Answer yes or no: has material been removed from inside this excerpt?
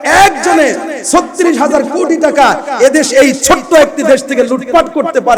no